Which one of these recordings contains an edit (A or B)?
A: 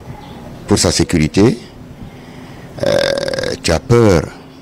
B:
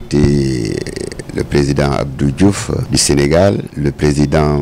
B